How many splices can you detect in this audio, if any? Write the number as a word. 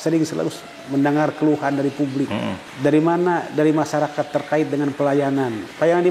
one